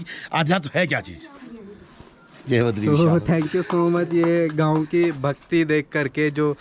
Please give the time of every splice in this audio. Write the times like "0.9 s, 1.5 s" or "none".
none